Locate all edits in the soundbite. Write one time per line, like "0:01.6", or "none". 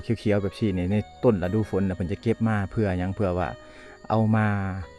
none